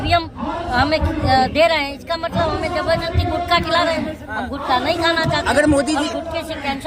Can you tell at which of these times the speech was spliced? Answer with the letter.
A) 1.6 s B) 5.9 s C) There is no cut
C